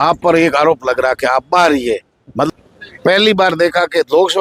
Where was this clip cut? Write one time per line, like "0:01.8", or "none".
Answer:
0:02.5